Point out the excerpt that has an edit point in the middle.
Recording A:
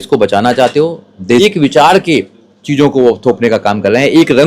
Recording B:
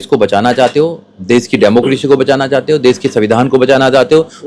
A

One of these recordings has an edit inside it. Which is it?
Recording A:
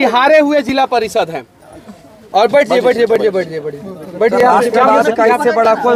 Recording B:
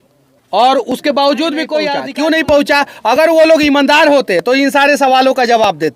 B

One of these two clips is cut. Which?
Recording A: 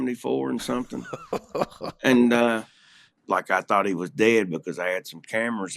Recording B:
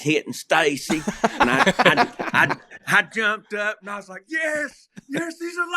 A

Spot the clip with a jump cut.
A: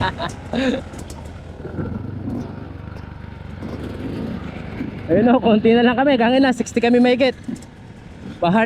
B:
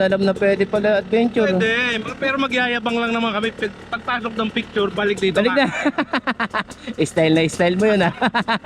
A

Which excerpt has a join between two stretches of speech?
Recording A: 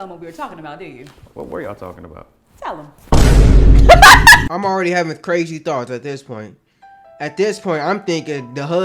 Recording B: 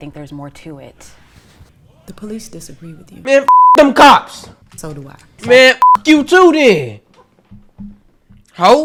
A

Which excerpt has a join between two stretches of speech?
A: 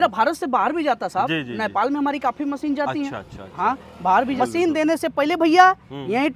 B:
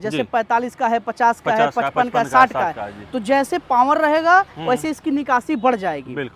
A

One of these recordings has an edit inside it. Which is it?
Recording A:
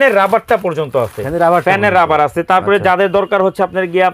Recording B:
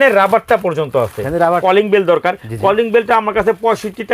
B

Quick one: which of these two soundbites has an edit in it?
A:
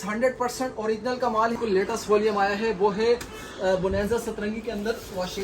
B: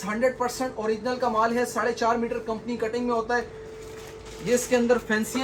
A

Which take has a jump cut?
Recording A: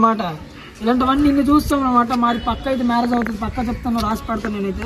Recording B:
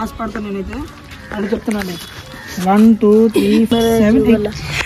B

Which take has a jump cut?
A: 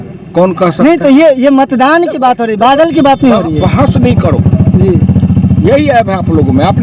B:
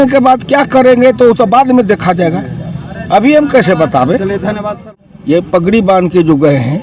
B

